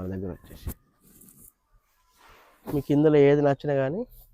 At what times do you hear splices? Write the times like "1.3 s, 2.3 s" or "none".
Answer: 0.9 s